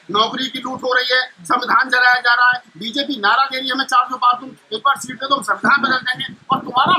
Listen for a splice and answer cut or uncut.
uncut